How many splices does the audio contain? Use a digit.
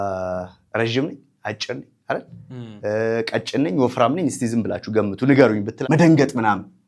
1